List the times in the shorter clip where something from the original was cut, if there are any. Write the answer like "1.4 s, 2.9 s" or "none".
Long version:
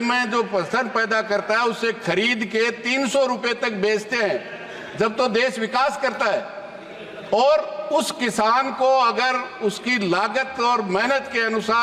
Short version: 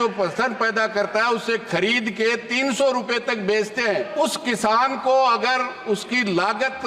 4.1 s